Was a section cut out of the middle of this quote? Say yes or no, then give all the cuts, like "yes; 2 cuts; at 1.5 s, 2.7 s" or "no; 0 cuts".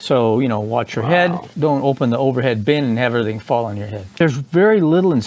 yes; 2 cuts; at 1.5 s, 4.1 s